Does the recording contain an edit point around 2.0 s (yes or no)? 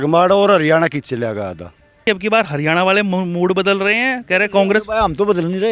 yes